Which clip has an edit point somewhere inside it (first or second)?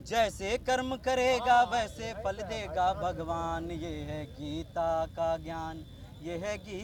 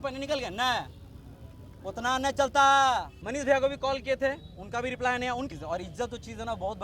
second